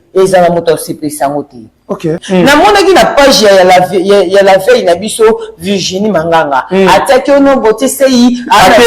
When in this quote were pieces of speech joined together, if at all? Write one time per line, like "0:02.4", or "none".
0:02.2

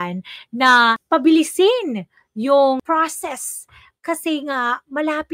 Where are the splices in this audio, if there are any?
0:01.0
0:02.8

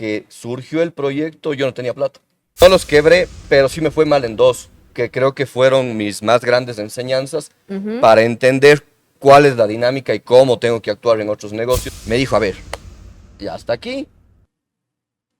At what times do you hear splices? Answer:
0:02.6
0:11.9

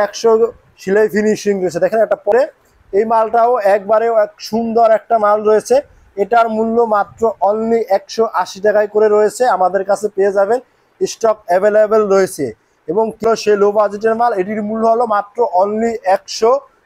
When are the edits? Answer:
0:02.3
0:13.2

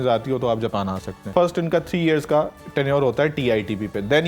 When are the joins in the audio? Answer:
0:01.3

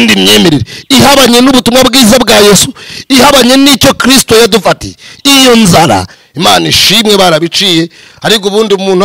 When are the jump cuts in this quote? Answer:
0:06.2

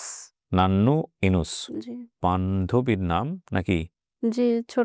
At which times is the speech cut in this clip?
0:02.2

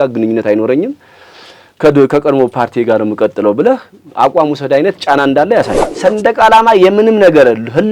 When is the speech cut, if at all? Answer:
0:05.9

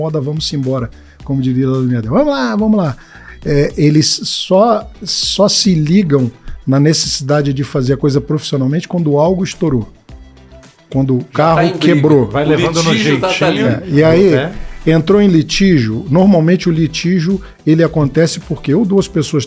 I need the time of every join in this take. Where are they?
none

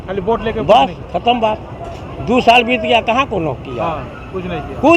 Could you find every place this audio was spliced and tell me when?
none

